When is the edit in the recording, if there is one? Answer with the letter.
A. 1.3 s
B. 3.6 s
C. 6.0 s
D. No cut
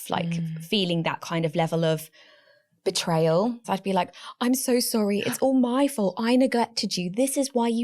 B